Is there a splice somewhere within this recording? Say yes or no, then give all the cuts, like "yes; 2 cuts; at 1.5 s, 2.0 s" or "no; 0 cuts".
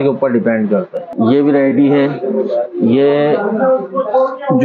yes; 1 cut; at 1.0 s